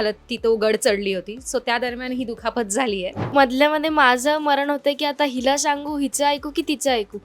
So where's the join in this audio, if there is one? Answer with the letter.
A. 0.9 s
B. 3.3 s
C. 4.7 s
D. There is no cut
B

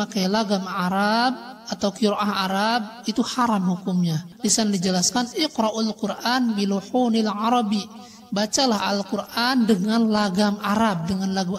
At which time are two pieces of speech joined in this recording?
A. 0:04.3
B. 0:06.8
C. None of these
A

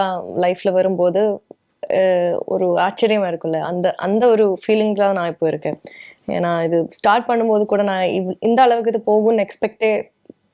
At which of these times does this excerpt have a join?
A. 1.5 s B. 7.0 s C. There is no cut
C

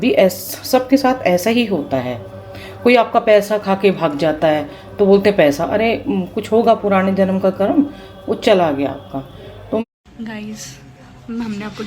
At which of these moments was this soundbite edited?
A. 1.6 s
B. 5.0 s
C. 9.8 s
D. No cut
C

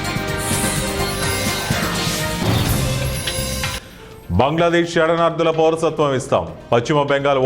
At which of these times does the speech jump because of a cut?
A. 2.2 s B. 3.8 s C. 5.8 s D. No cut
B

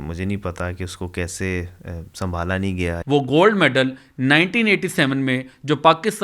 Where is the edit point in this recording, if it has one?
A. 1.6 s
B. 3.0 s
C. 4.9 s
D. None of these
B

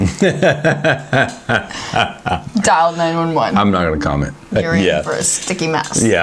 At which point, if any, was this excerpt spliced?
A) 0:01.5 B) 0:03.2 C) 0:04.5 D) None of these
C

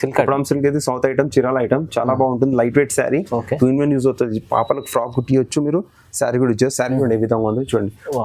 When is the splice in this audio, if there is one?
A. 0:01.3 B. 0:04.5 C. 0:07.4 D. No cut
D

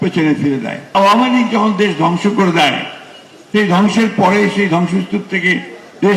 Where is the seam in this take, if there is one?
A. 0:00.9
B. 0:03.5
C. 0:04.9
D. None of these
A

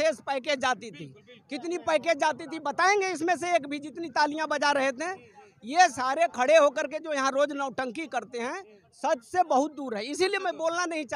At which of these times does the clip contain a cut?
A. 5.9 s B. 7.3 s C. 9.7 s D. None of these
D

